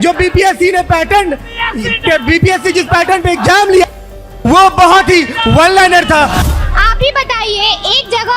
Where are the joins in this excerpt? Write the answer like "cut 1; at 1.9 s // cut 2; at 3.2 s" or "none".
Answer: cut 1; at 6.4 s